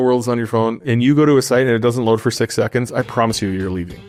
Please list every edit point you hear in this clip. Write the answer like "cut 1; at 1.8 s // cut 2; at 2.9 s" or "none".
none

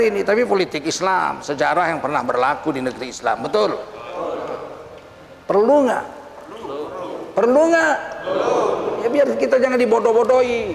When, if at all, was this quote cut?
none

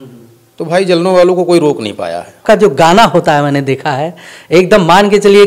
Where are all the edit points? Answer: cut 1; at 2.4 s

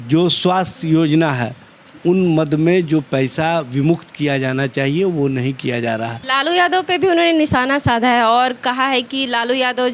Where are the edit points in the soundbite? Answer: cut 1; at 6.2 s

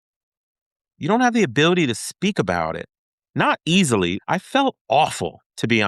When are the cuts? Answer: cut 1; at 4.2 s

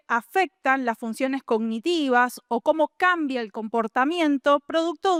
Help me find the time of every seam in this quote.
none

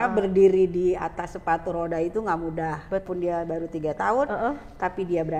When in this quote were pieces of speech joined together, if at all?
cut 1; at 3.1 s

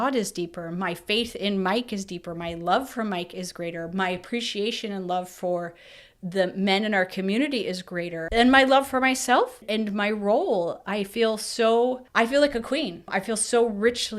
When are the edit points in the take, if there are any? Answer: cut 1; at 8.2 s // cut 2; at 9.6 s // cut 3; at 12.0 s // cut 4; at 13.1 s

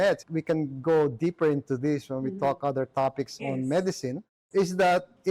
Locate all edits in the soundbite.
cut 1; at 4.3 s

